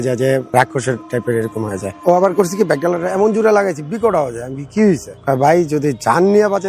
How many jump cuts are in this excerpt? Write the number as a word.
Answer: one